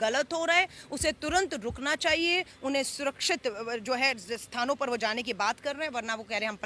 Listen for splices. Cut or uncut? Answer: uncut